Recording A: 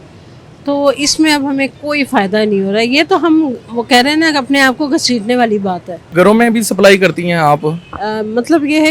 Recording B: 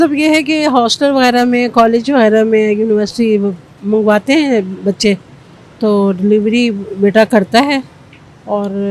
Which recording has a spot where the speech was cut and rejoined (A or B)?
A